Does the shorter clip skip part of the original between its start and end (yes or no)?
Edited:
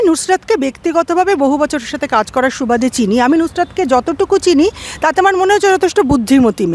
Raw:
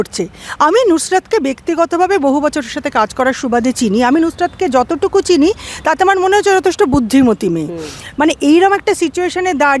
no